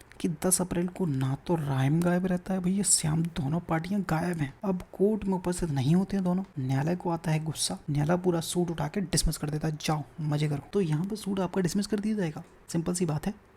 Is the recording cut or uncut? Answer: cut